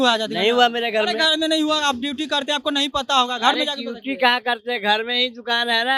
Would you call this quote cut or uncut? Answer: uncut